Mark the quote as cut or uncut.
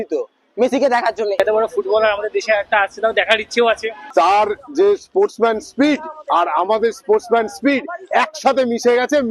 cut